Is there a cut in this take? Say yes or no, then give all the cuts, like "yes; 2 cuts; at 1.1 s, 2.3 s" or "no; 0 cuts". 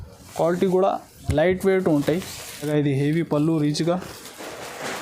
yes; 1 cut; at 2.7 s